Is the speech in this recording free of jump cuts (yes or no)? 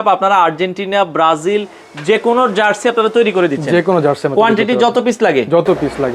yes